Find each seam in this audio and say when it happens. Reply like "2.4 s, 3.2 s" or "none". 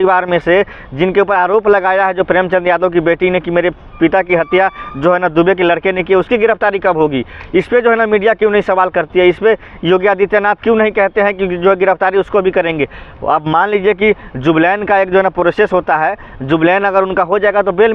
none